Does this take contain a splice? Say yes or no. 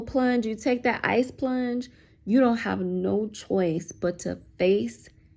no